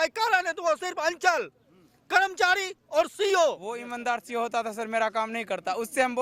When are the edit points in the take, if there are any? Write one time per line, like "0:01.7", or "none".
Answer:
0:03.9